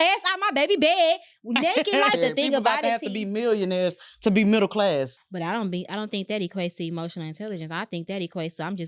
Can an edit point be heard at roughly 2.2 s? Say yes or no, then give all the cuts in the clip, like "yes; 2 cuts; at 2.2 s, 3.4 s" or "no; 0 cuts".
yes; 2 cuts; at 2.2 s, 5.1 s